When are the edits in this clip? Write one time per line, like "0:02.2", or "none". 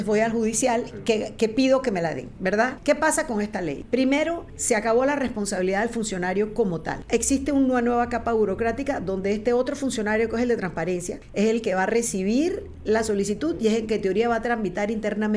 0:02.8
0:03.8
0:04.5
0:06.9
0:11.2